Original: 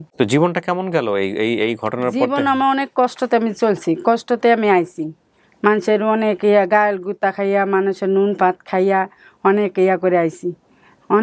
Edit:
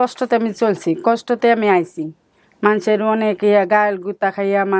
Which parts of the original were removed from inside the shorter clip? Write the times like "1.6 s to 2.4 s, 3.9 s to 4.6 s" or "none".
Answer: none